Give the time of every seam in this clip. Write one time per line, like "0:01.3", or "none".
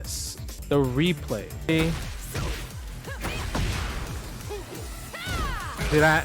0:01.7